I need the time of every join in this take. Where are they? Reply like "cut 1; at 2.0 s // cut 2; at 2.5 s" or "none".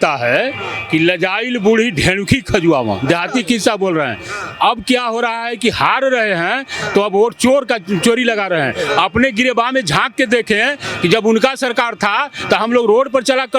none